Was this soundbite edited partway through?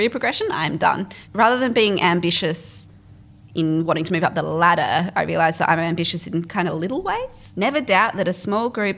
yes; 2 cuts; at 1.2 s, 7.4 s

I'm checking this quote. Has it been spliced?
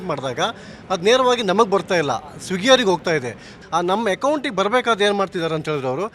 yes; 1 cut; at 3.5 s

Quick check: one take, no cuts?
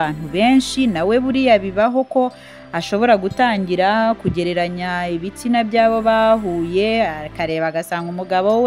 yes; 0 cuts

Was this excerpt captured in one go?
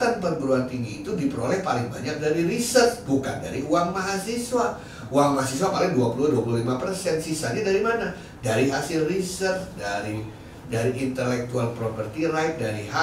yes; 0 cuts

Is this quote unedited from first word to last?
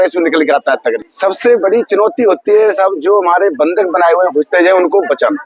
no; 1 cut; at 1.1 s

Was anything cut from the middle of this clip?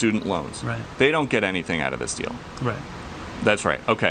yes; 1 cut; at 3.2 s

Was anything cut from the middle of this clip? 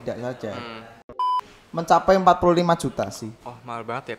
yes; 1 cut; at 1.3 s

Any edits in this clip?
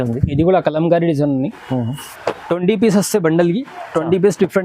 yes; 1 cut; at 2.1 s

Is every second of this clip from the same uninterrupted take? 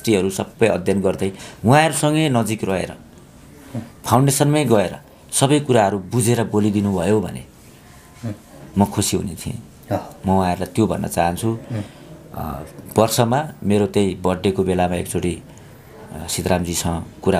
yes; 0 cuts

